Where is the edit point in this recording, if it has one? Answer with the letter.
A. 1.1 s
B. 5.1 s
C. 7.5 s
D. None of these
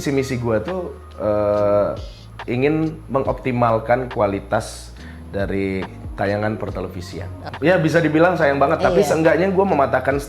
C